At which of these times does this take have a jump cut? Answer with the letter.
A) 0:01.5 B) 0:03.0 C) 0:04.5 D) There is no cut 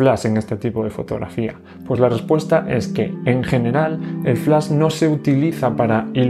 D